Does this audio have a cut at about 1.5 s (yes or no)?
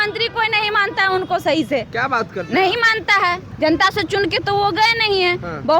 no